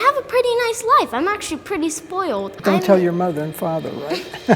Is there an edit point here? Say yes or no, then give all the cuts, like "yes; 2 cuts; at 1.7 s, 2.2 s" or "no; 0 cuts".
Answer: yes; 1 cut; at 2.6 s